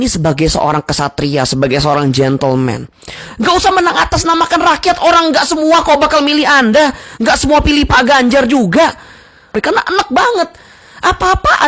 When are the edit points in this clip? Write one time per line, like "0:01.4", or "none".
none